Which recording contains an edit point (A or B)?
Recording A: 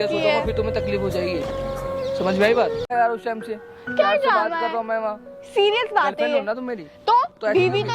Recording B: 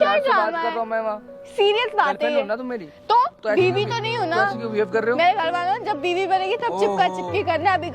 A